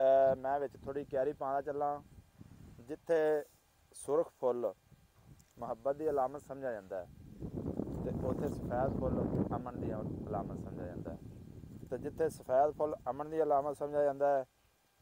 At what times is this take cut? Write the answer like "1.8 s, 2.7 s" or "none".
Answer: none